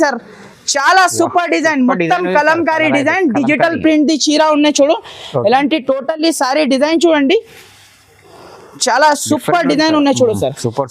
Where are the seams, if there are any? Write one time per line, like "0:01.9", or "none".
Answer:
none